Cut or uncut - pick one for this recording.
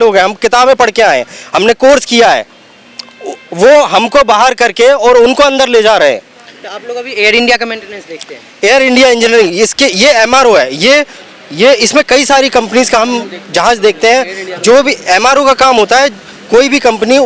uncut